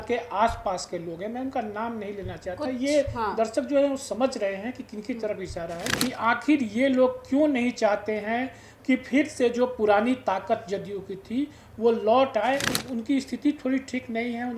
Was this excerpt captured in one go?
no; 2 cuts; at 5.9 s, 12.8 s

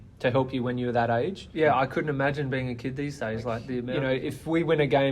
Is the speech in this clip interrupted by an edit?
yes; 2 cuts; at 1.4 s, 3.9 s

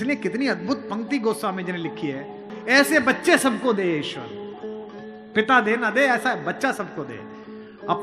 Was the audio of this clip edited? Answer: yes; 1 cut; at 2.5 s

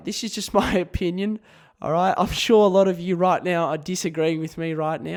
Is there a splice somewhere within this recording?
no; 0 cuts

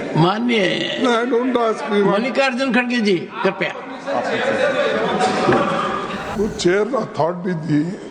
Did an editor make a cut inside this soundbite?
yes; 1 cut; at 6.3 s

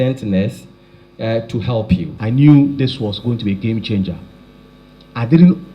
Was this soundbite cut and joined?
yes; 1 cut; at 2.1 s

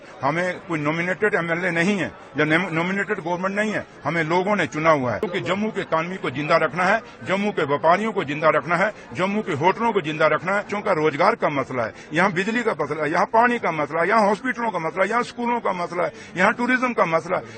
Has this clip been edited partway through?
yes; 2 cuts; at 5.2 s, 10.7 s

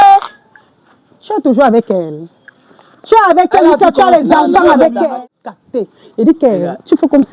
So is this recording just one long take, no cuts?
no; 1 cut; at 5.2 s

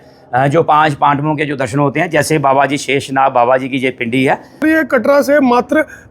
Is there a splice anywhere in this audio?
no; 0 cuts

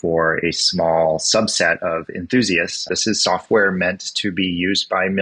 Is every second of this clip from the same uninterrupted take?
no; 1 cut; at 2.9 s

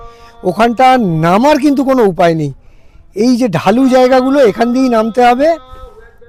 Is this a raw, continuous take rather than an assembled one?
yes; 0 cuts

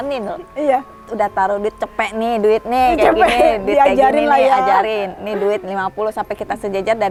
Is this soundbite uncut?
yes; 0 cuts

